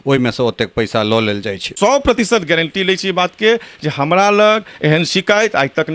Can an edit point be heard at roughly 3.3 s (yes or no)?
no